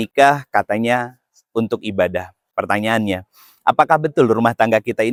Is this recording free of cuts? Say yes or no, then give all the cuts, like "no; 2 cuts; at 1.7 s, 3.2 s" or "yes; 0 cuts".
yes; 0 cuts